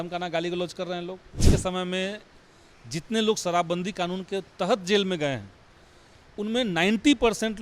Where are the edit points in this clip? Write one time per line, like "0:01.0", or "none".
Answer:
0:01.5